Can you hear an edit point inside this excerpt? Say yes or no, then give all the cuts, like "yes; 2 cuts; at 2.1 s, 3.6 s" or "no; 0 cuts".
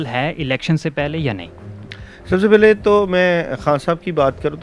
no; 0 cuts